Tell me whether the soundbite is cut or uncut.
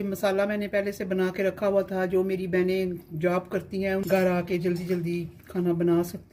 cut